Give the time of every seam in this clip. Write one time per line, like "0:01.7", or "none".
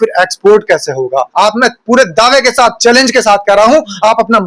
0:01.3

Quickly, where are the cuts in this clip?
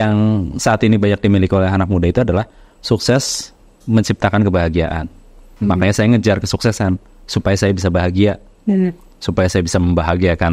none

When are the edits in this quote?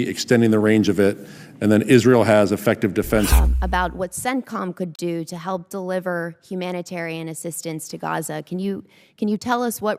0:03.3

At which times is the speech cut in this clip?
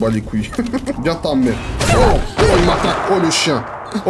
0:01.0

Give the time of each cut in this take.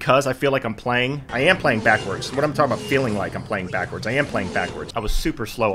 0:01.3
0:04.8

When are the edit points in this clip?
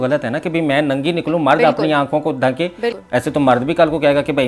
0:03.0

